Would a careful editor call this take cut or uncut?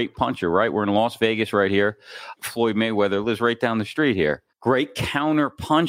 cut